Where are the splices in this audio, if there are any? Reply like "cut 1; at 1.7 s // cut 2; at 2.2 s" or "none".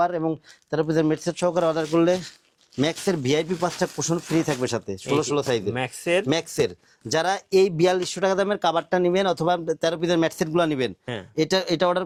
none